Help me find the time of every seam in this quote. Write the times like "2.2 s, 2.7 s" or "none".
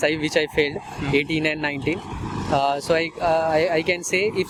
none